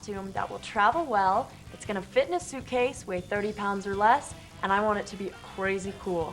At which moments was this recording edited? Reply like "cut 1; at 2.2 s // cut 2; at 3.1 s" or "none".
cut 1; at 5.3 s